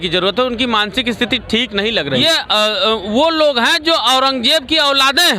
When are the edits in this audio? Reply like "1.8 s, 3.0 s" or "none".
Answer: 2.2 s